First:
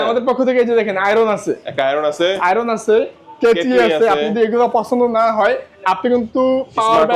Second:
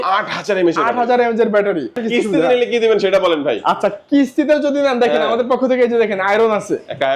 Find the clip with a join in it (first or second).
second